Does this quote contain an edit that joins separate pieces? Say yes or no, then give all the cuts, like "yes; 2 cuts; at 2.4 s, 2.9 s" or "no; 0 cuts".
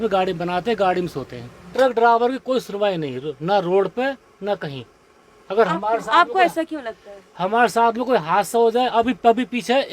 yes; 1 cut; at 1.6 s